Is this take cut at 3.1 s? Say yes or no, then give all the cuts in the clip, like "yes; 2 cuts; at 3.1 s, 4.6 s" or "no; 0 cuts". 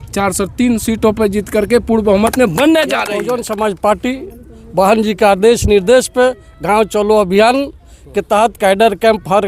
yes; 1 cut; at 3.1 s